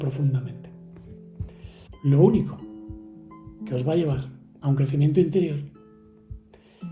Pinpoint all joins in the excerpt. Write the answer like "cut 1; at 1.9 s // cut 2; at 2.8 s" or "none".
cut 1; at 1.8 s